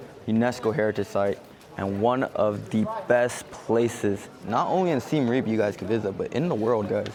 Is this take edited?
no; 0 cuts

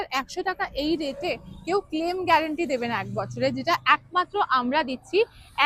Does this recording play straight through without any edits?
yes; 0 cuts

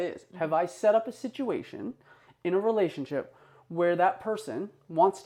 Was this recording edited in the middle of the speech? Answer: no; 0 cuts

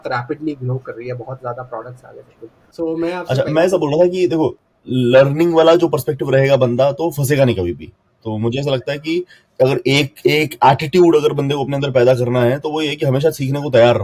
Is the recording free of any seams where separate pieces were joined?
yes; 0 cuts

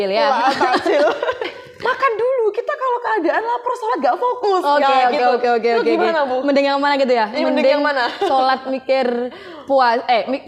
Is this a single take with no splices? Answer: no; 1 cut; at 1.5 s

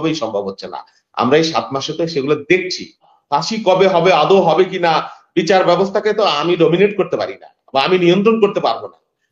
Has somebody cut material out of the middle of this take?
yes; 1 cut; at 3.0 s

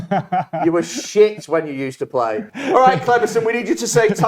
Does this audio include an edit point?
yes; 1 cut; at 2.5 s

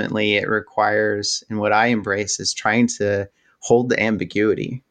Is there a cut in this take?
no; 0 cuts

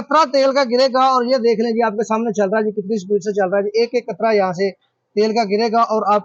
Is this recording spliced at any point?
no; 0 cuts

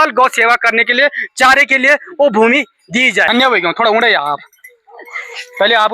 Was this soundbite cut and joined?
yes; 1 cut; at 3.3 s

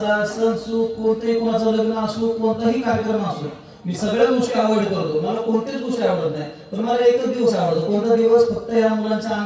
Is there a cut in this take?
no; 0 cuts

